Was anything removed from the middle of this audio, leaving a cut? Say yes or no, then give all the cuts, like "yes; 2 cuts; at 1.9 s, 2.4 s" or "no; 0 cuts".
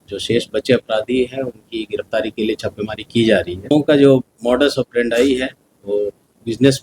yes; 1 cut; at 3.7 s